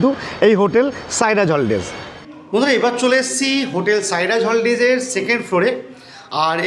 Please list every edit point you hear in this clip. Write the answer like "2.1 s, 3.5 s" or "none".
none